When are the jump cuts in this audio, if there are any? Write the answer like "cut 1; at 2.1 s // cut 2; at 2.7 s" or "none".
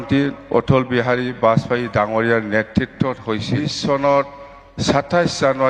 cut 1; at 3.5 s